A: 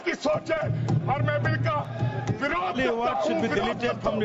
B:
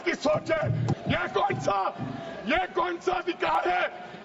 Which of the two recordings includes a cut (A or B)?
B